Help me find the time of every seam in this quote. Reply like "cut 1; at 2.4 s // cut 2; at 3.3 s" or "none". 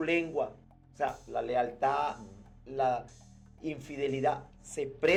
none